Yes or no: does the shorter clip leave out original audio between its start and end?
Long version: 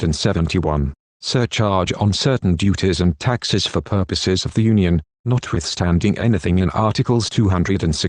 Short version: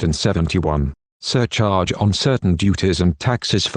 no